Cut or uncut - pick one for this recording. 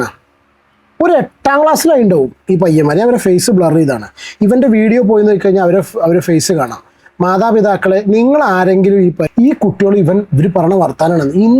cut